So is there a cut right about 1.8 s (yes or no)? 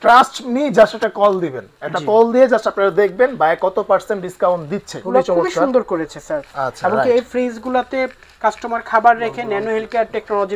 no